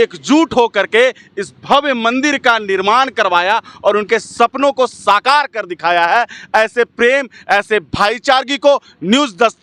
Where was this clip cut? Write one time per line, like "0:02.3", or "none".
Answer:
none